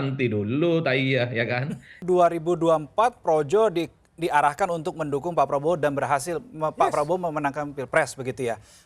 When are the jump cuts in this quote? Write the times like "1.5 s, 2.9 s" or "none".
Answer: 1.9 s